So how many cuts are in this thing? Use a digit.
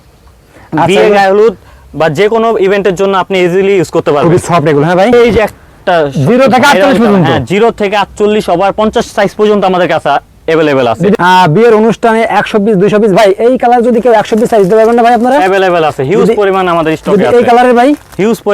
2